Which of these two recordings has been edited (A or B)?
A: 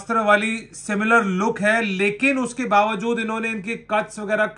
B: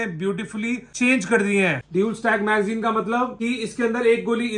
B